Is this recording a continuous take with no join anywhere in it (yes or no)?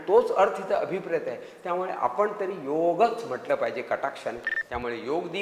no